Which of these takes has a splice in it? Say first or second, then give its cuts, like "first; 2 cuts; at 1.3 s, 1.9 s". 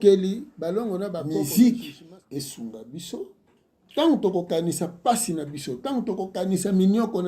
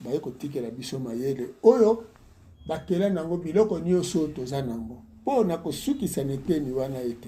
first; 1 cut; at 1.2 s